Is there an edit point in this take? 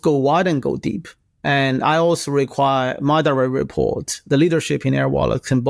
no; 0 cuts

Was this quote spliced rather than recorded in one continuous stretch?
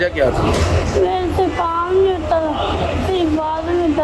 no; 0 cuts

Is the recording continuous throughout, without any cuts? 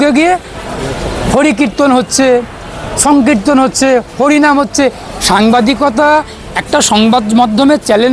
yes; 0 cuts

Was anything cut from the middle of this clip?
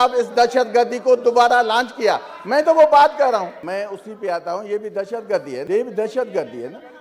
yes; 2 cuts; at 3.6 s, 5.6 s

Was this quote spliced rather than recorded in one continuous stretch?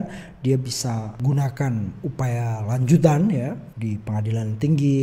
yes; 2 cuts; at 1.2 s, 3.7 s

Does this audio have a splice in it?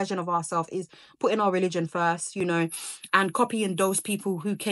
no; 0 cuts

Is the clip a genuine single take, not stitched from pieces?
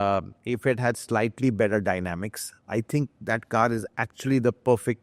yes; 0 cuts

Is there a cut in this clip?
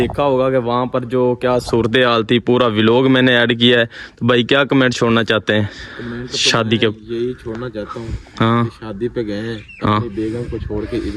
no; 0 cuts

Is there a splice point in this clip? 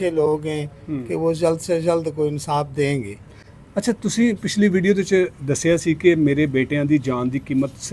no; 0 cuts

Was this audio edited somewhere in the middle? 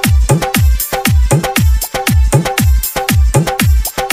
no; 0 cuts

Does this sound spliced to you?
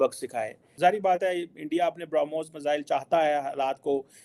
no; 0 cuts

